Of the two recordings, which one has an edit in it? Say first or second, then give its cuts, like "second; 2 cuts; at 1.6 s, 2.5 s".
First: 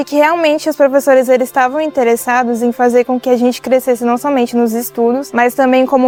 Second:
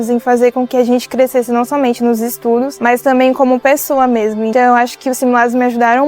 second; 1 cut; at 4.5 s